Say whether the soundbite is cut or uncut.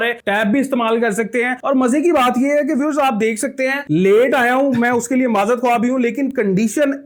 uncut